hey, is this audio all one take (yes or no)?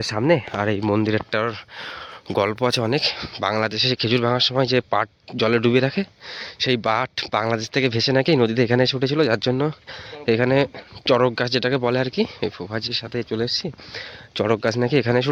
yes